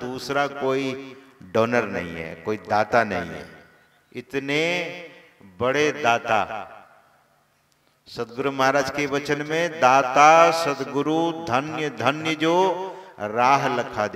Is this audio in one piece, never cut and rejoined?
yes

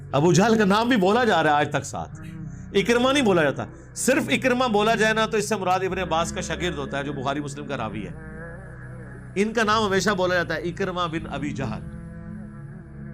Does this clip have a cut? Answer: yes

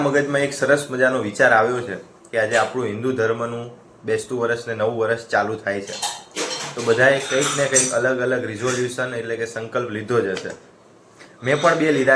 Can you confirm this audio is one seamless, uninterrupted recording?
yes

